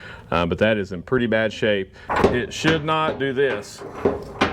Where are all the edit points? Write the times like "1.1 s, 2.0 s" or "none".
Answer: 2.0 s